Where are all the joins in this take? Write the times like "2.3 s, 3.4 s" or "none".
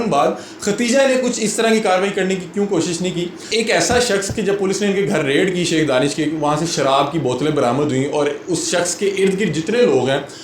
3.5 s